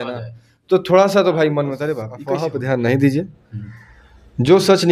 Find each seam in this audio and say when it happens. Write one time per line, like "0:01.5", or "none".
0:02.1